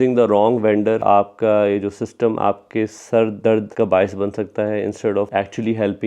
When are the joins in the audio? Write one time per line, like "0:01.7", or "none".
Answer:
0:01.0
0:03.7
0:05.3

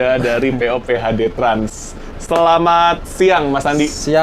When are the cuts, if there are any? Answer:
none

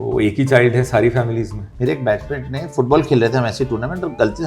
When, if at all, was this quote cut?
0:01.6

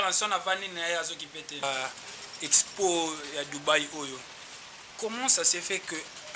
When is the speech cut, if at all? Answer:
0:01.6

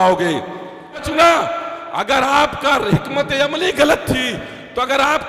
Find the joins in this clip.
0:01.1

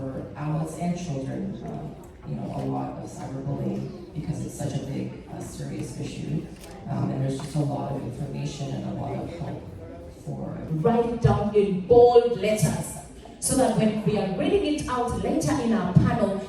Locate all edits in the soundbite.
0:10.6

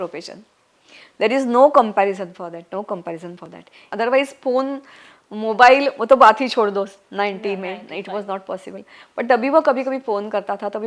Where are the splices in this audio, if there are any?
0:03.9

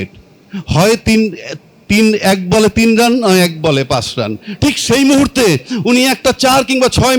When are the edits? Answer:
none

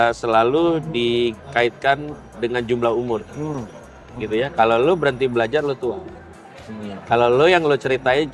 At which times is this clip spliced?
none

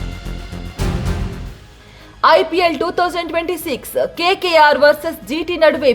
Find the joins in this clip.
none

